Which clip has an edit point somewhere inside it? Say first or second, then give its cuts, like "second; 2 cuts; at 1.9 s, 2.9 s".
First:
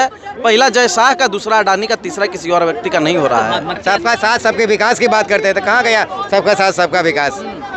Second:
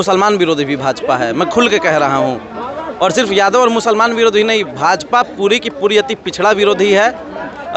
first; 1 cut; at 3.7 s